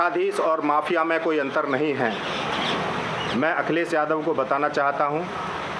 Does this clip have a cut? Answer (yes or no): no